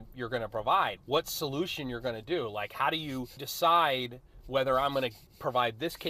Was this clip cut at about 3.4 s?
yes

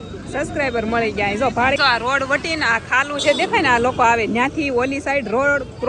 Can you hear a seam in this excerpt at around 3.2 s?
no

